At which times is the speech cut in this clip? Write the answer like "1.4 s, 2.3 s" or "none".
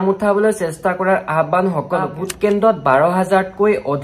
2.1 s